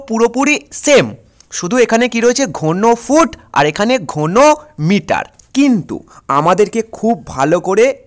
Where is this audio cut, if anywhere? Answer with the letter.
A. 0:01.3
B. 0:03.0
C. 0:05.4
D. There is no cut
C